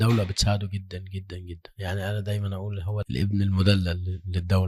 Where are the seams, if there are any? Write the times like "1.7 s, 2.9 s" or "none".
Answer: 3.0 s

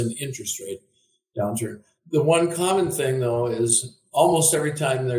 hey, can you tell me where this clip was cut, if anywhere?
1.9 s

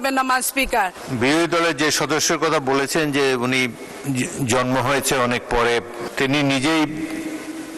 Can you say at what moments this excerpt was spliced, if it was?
1.0 s, 3.9 s, 6.0 s

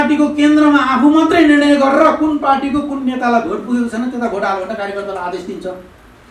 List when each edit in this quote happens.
none

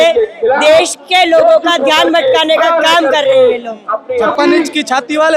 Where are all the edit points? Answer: 4.0 s

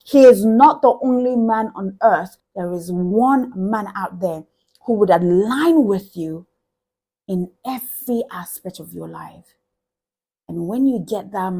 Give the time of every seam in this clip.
2.3 s

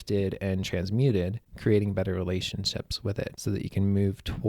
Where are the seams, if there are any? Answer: 1.4 s, 3.4 s

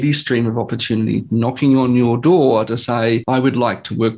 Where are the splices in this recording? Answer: 3.2 s

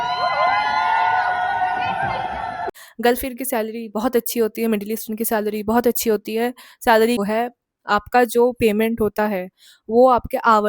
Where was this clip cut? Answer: 2.8 s, 7.2 s

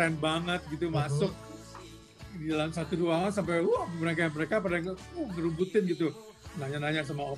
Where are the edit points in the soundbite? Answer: none

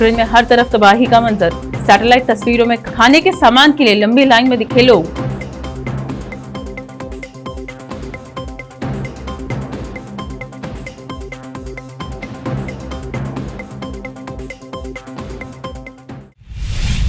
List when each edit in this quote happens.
16.2 s

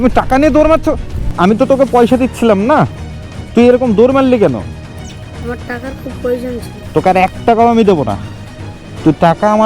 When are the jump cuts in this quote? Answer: 1.3 s, 6.8 s

